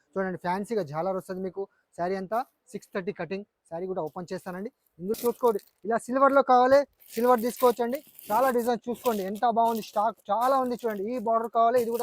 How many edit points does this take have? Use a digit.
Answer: 1